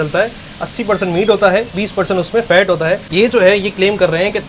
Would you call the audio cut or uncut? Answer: cut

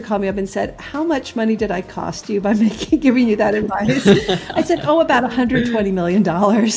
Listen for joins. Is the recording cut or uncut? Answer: uncut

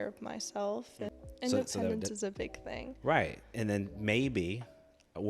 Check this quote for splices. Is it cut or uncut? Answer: cut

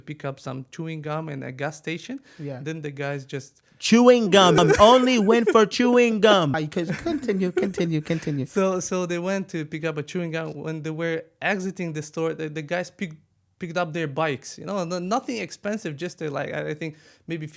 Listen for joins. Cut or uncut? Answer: uncut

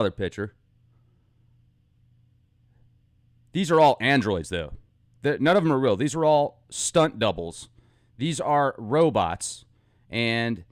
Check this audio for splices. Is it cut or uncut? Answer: cut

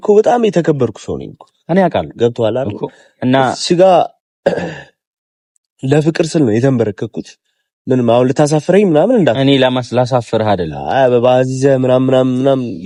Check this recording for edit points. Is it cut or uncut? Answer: uncut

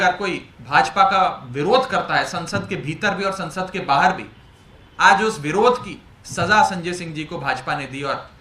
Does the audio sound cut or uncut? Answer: uncut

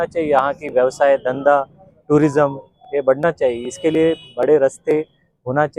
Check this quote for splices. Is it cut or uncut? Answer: uncut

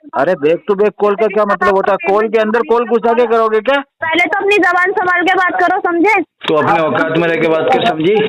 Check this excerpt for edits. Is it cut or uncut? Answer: cut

